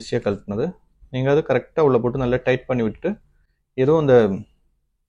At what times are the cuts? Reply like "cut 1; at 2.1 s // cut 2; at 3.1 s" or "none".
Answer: none